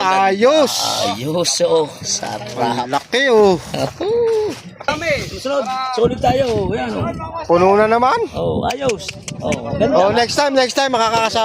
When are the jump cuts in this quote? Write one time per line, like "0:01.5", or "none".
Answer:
0:04.9